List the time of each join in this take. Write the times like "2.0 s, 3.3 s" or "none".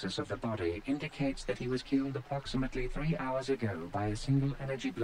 none